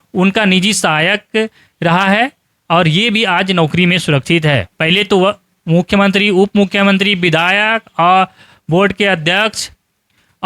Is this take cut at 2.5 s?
no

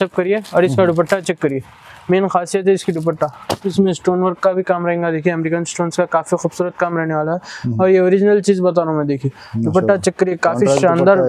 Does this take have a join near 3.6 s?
yes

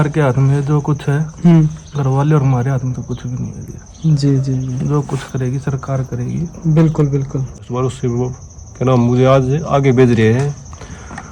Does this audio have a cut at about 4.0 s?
no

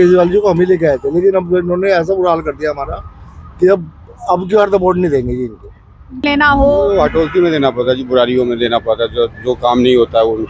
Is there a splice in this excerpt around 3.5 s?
no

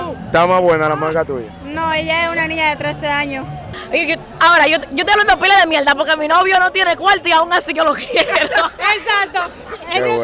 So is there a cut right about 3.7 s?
yes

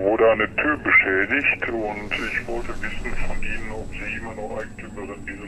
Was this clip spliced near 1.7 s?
no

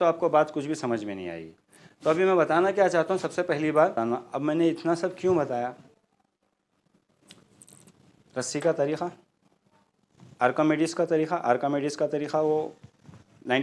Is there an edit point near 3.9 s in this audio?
yes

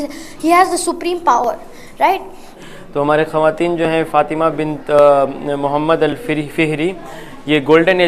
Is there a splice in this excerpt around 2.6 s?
yes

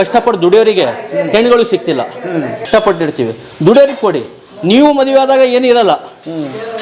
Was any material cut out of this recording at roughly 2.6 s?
yes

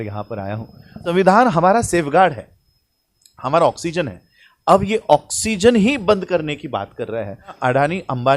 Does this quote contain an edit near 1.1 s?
yes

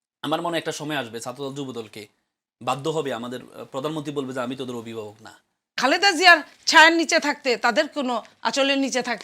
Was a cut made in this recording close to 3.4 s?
no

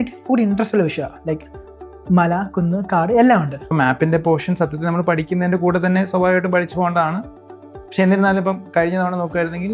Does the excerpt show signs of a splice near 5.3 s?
no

